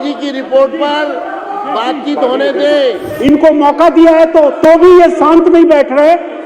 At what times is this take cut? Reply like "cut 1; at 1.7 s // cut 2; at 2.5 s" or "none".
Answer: cut 1; at 3.1 s

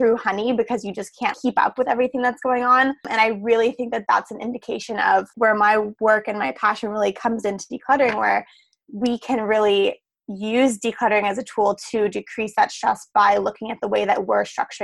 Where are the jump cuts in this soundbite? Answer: cut 1; at 1.3 s // cut 2; at 3.1 s // cut 3; at 5.3 s

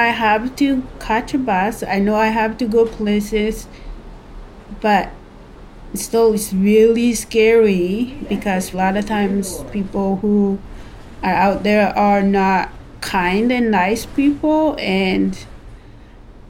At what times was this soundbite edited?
cut 1; at 8.7 s

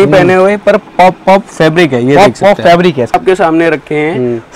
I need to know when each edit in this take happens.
cut 1; at 3.1 s

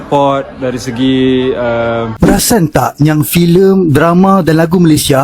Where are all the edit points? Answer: cut 1; at 2.1 s

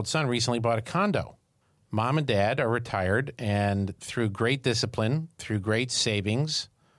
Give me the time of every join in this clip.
none

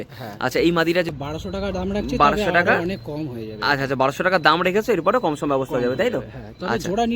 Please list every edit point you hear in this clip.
cut 1; at 1.1 s

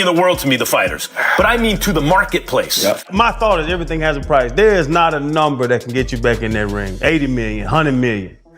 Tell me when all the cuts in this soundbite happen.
cut 1; at 3.1 s

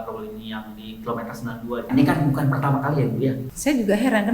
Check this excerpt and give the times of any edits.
cut 1; at 1.9 s // cut 2; at 3.4 s

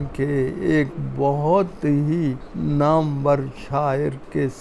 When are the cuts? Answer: cut 1; at 2.5 s

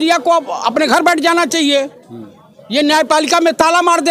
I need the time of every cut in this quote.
none

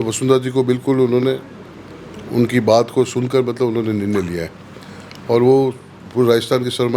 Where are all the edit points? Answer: none

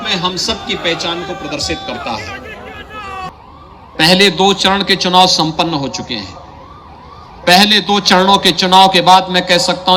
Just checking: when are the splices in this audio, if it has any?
cut 1; at 3.3 s

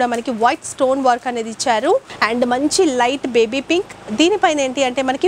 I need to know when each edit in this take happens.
cut 1; at 2.1 s

